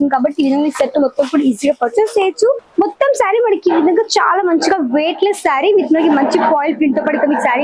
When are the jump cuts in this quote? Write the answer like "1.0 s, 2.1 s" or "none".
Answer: 2.6 s